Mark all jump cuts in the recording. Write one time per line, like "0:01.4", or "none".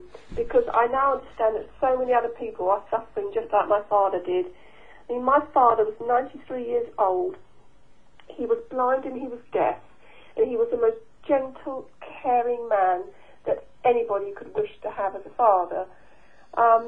none